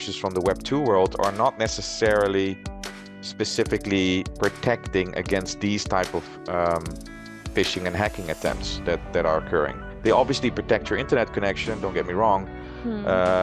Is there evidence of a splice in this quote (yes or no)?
no